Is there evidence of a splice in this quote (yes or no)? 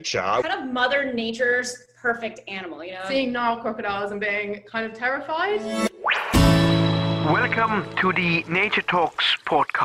no